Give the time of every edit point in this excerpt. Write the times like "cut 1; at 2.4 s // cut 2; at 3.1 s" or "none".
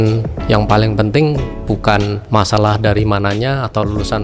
cut 1; at 2.2 s